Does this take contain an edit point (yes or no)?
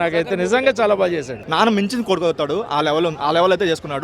yes